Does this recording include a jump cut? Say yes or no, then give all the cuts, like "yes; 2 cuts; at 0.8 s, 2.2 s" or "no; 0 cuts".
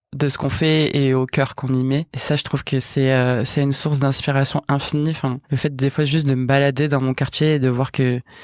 yes; 1 cut; at 5.4 s